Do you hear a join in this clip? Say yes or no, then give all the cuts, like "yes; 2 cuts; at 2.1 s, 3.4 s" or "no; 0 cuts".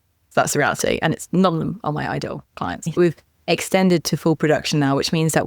yes; 1 cut; at 3.0 s